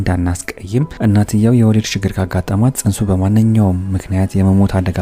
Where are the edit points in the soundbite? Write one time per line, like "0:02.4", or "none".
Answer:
0:00.9